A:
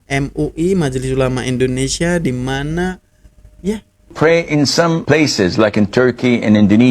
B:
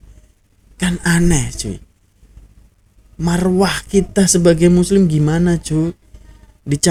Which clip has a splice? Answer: A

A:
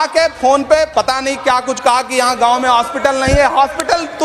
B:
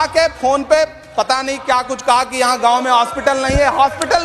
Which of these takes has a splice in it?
A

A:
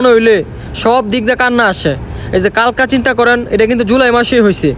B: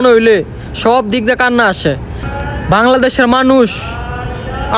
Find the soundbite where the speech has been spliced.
B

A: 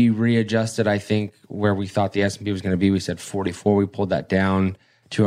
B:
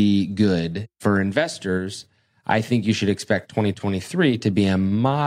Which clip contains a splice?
B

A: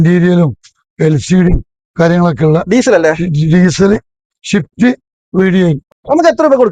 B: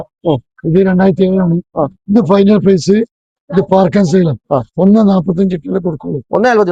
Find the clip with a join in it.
A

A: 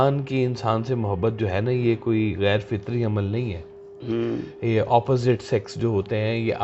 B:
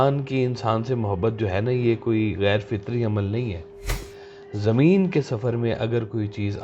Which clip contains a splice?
B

